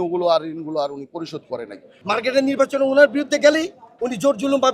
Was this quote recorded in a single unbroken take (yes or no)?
no